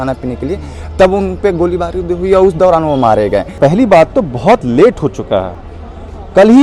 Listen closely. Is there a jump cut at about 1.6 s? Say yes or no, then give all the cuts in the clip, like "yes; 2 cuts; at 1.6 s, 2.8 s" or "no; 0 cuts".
no; 2 cuts; at 3.5 s, 5.6 s